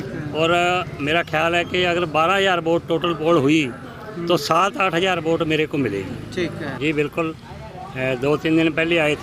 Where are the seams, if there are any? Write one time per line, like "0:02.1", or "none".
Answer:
0:06.7